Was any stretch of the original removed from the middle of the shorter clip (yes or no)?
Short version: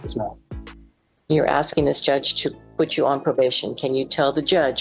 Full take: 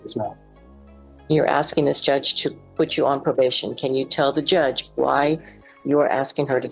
no